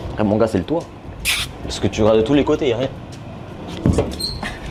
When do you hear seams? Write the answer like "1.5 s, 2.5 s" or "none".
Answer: none